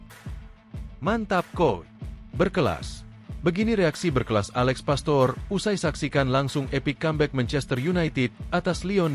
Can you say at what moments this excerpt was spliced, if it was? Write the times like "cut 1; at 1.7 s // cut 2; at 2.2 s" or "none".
cut 1; at 0.9 s

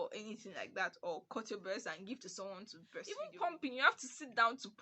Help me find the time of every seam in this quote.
cut 1; at 3.1 s

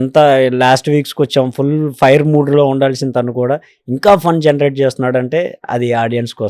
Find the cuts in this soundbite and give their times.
none

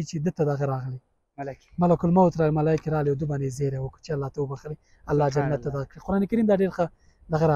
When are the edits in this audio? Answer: none

